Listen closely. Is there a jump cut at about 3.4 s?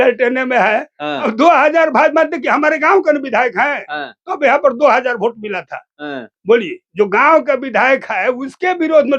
no; 1 cut; at 1.3 s

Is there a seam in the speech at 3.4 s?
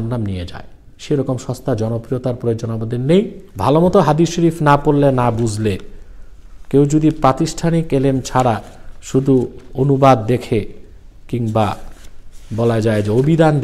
yes; 1 cut; at 3.4 s

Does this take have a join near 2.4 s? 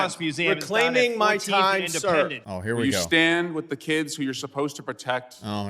yes; 1 cut; at 2.4 s

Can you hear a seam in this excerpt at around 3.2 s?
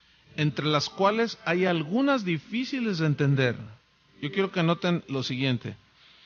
yes; 1 cut; at 3.2 s

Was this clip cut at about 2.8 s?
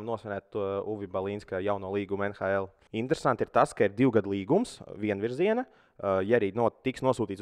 yes; 1 cut; at 2.8 s

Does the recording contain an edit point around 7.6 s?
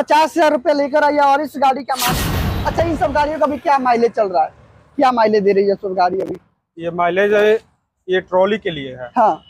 no; 1 cut; at 2.0 s

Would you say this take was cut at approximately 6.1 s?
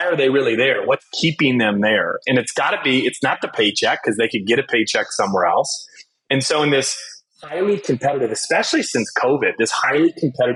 no; 0 cuts

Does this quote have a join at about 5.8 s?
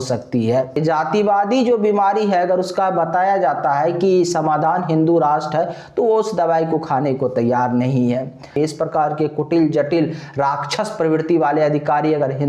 no; 2 cuts; at 0.7 s, 8.6 s

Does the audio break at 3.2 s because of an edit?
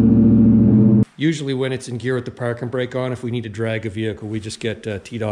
no; 1 cut; at 1.0 s

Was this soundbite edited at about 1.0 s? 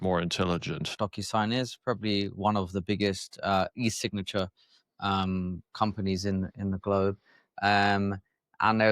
yes; 1 cut; at 1.0 s

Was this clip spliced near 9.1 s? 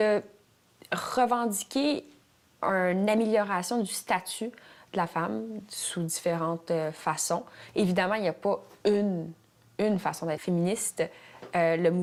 no; 0 cuts

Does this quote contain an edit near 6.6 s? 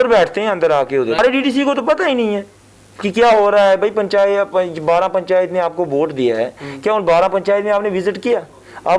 no; 1 cut; at 1.2 s

